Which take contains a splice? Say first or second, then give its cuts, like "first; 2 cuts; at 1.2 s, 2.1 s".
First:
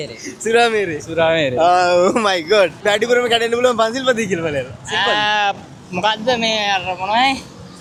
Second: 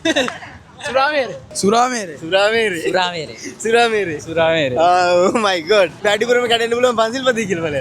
second; 1 cut; at 1.5 s